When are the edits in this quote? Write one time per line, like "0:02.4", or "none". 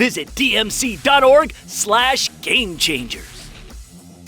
0:03.2

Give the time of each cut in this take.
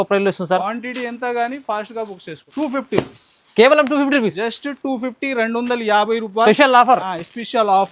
0:02.4

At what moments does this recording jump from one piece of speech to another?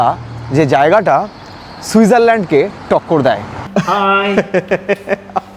0:03.5

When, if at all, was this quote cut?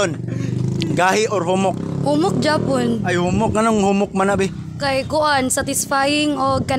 none

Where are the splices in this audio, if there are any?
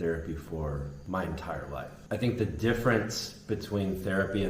0:01.0
0:02.0

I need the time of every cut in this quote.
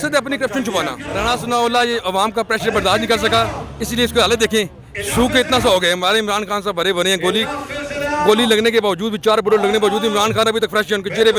0:01.1

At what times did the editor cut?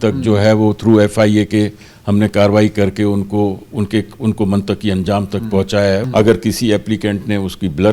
0:06.0

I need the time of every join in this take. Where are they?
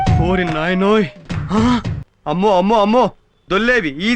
0:02.1

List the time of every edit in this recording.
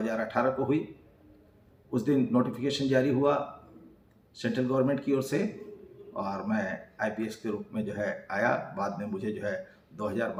none

